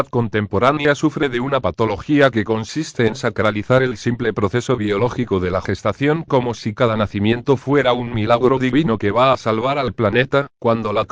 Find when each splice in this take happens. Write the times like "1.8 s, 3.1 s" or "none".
2.3 s